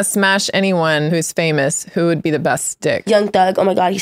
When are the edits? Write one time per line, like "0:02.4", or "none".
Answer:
0:01.1
0:03.0